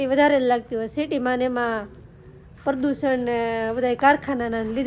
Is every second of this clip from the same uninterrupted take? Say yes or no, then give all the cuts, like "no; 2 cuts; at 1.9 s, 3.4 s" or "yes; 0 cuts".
yes; 0 cuts